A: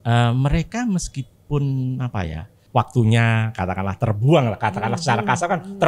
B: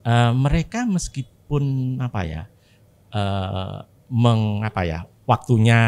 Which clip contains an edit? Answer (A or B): A